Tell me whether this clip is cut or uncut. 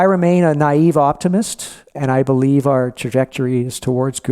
cut